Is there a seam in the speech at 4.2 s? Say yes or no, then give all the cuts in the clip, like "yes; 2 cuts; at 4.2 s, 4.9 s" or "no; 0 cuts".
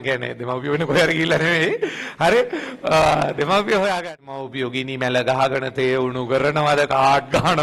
yes; 1 cut; at 4.2 s